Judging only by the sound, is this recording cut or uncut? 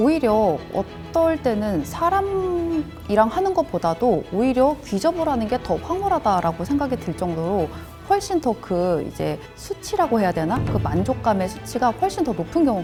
uncut